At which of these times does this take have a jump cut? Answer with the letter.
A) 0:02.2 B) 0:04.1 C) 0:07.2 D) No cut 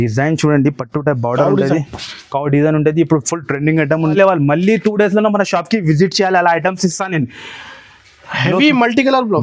B